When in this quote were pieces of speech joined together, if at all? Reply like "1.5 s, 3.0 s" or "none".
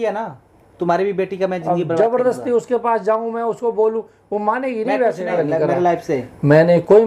5.3 s